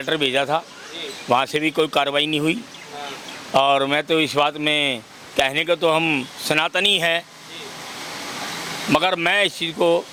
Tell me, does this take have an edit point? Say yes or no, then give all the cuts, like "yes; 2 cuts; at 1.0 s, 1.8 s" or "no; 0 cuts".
no; 0 cuts